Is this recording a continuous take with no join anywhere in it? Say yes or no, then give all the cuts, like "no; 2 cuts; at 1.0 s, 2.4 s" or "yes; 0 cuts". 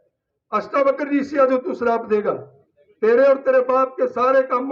yes; 0 cuts